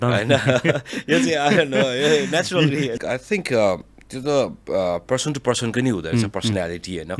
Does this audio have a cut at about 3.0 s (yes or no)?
yes